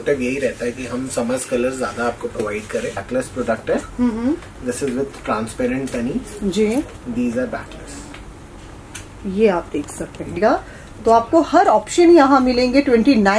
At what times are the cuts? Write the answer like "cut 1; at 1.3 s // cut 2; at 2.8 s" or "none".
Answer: cut 1; at 3.0 s // cut 2; at 10.4 s